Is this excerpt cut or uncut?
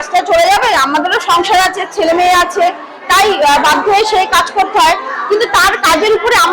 uncut